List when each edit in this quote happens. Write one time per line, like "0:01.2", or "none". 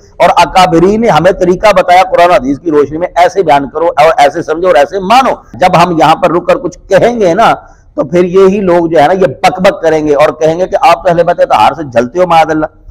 0:05.5